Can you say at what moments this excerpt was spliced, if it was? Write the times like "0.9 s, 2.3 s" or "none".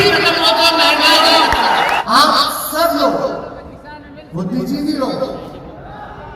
1.9 s